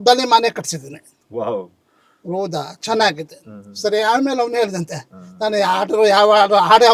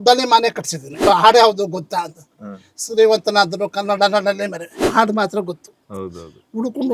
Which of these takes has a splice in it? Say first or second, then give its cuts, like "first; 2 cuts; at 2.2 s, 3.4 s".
second; 2 cuts; at 1.1 s, 4.8 s